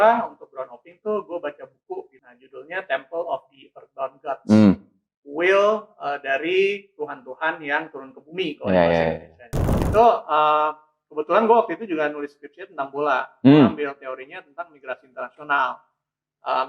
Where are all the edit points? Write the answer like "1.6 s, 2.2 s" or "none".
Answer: 2.2 s, 9.8 s